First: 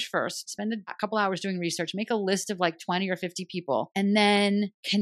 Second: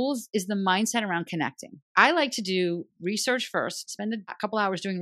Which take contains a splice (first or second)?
second